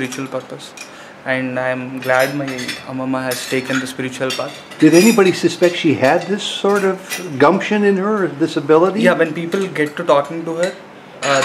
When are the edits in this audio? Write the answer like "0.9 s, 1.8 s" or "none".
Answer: none